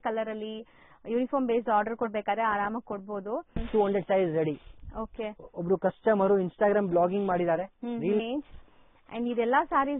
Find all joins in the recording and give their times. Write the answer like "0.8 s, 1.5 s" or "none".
3.6 s, 8.2 s